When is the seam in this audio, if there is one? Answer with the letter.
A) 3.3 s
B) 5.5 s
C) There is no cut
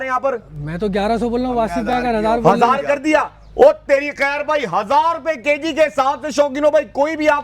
C